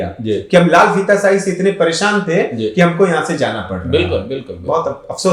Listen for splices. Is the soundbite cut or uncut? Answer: uncut